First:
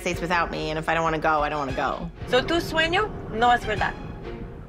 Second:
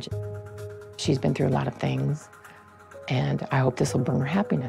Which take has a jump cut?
first; 1 cut; at 2.1 s

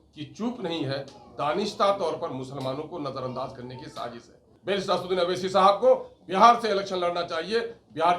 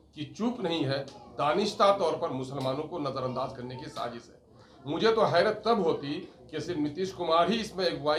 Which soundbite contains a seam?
first; 1 cut; at 4.5 s

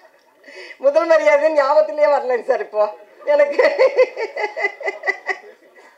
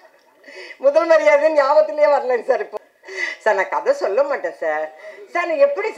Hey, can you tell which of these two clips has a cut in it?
second; 1 cut; at 2.7 s

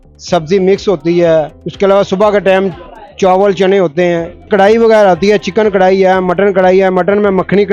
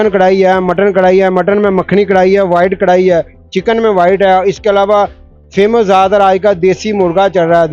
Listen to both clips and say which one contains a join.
first; 2 cuts; at 1.6 s, 4.5 s

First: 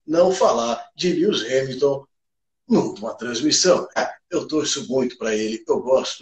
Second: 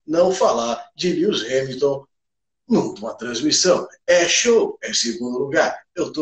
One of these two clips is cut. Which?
first; 1 cut; at 4.0 s

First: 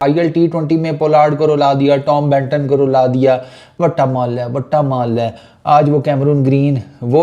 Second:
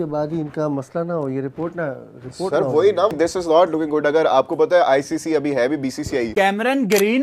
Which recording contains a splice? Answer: second; 2 cuts; at 3.2 s, 6.3 s

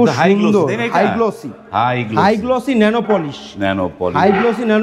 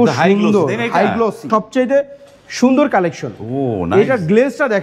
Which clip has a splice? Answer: second; 1 cut; at 1.5 s

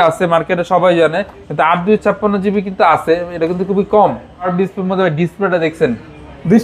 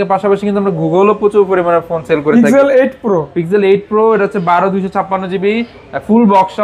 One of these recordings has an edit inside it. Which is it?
first; 1 cut; at 4.5 s

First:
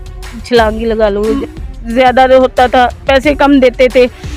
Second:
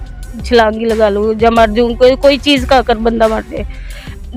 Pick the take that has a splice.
first; 1 cut; at 1.4 s

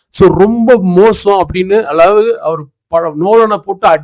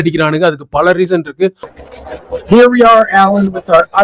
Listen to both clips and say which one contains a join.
second; 1 cut; at 1.7 s

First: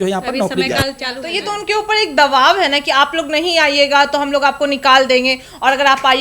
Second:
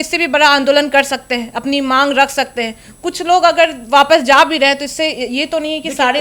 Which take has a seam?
first; 1 cut; at 1.2 s

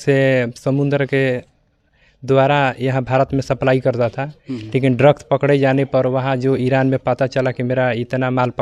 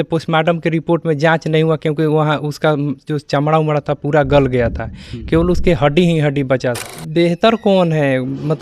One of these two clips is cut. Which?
second; 1 cut; at 6.9 s

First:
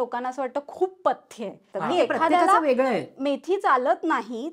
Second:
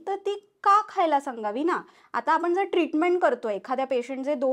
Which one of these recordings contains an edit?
first; 1 cut; at 1.7 s

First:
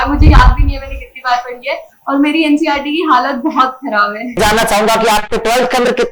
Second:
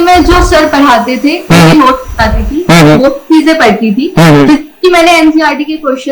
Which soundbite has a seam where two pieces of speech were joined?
first; 1 cut; at 4.4 s

